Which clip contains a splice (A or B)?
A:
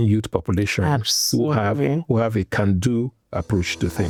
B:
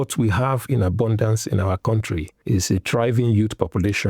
B